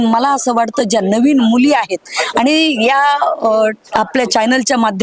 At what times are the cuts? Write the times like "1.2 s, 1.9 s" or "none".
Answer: none